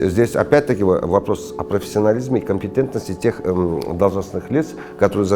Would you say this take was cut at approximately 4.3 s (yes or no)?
no